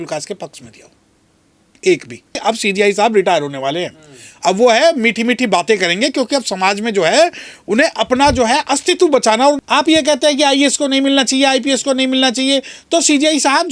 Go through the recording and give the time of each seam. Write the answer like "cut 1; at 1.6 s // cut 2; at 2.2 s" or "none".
cut 1; at 2.4 s // cut 2; at 9.6 s